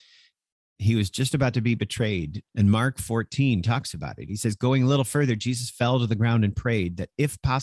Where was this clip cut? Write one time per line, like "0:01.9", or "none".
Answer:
0:02.4